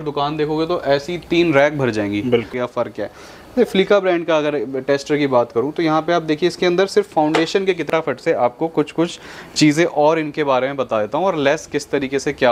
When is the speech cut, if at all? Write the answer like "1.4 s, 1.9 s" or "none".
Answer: 2.5 s, 7.9 s